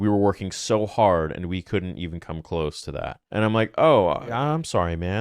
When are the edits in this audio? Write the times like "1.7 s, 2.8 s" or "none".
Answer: 3.1 s, 4.3 s